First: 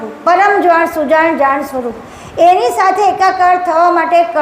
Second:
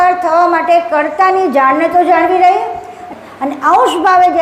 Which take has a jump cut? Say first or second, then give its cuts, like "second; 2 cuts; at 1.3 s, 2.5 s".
second; 1 cut; at 3.0 s